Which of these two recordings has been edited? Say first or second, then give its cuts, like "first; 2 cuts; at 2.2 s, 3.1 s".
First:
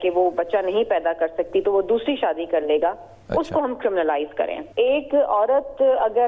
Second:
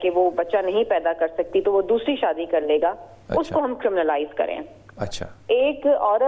first; 1 cut; at 4.6 s